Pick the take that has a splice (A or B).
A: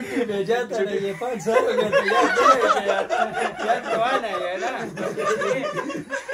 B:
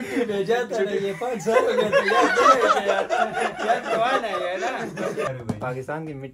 B